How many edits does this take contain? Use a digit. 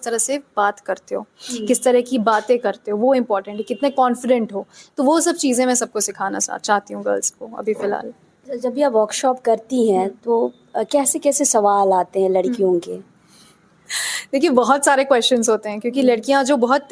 0